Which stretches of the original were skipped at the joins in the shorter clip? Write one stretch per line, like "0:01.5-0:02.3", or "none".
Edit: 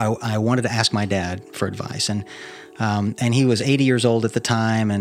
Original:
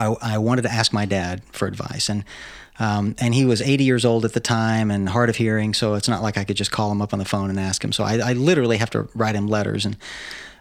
none